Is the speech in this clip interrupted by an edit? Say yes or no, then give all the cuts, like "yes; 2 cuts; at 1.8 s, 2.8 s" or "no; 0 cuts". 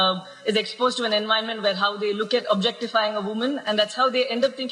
no; 0 cuts